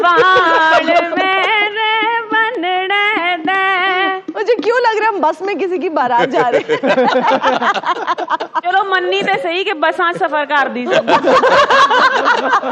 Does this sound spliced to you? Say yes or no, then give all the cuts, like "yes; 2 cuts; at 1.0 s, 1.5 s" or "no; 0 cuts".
no; 0 cuts